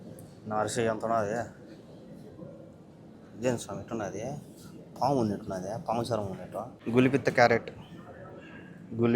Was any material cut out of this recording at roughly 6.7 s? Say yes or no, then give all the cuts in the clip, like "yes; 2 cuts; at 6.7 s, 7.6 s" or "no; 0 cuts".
yes; 1 cut; at 6.7 s